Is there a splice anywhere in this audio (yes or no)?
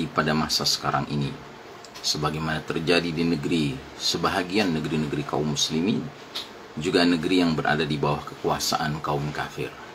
no